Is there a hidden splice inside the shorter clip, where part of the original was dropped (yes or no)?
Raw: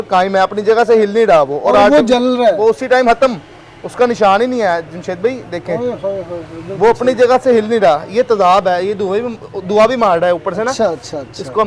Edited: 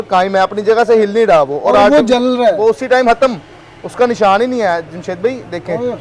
no